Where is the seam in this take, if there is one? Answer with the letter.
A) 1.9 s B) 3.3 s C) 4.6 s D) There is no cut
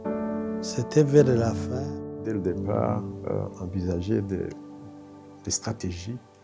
A